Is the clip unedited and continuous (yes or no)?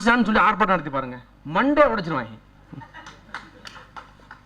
yes